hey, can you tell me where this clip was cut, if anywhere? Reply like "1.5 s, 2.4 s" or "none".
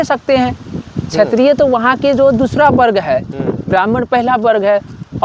none